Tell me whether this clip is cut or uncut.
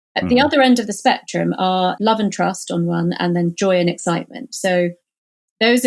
cut